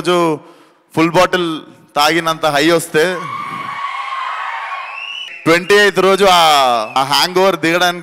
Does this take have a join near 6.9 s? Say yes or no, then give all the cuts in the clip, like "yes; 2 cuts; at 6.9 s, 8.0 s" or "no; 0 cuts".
yes; 2 cuts; at 5.2 s, 6.9 s